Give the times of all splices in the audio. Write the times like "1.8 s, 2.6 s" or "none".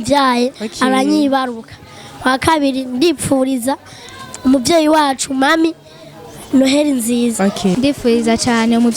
7.8 s